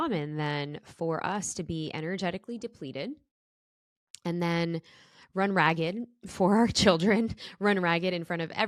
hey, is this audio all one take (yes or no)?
yes